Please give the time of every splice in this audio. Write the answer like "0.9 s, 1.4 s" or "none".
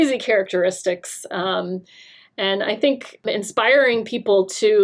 3.2 s

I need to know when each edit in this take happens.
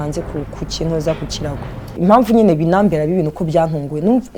1.8 s

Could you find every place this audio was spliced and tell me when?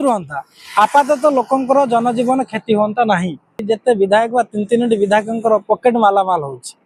3.6 s

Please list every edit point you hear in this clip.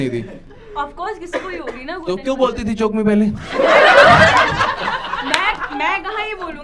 none

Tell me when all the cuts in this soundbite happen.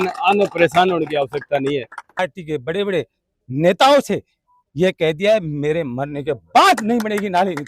2.2 s

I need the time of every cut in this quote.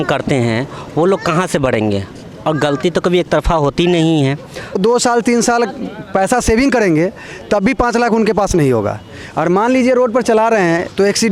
4.8 s

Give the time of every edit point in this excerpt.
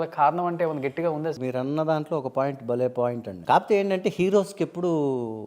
1.4 s, 3.3 s

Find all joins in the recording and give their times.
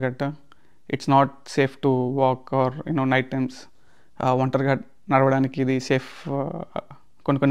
none

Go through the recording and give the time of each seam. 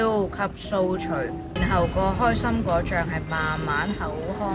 1.4 s

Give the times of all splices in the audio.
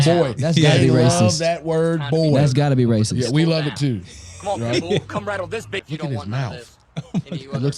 5.8 s

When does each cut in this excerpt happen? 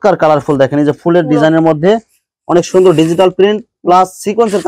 none

